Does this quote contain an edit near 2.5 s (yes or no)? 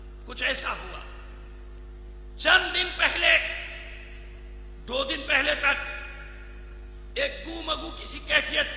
no